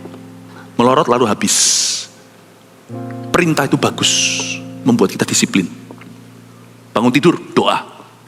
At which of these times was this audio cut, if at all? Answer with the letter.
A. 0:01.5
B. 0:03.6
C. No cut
B